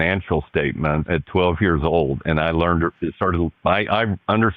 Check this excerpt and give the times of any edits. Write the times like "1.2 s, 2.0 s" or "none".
1.1 s